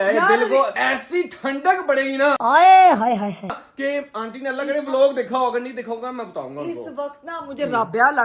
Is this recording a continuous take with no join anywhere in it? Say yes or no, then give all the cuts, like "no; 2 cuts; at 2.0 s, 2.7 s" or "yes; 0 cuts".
yes; 0 cuts